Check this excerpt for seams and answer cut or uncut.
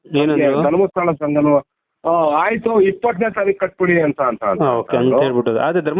uncut